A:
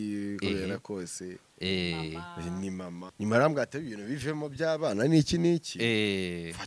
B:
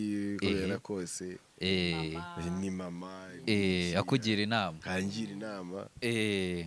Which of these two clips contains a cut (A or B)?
A